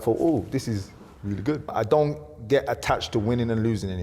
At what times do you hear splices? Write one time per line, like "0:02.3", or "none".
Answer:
0:01.7